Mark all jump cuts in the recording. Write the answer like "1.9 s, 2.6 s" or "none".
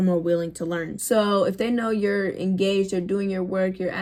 none